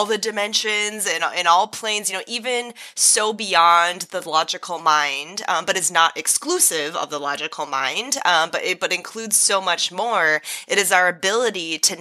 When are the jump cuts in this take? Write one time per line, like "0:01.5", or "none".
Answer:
none